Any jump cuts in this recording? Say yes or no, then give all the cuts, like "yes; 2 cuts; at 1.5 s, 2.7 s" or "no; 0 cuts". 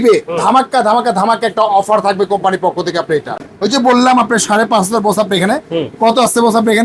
yes; 1 cut; at 3.4 s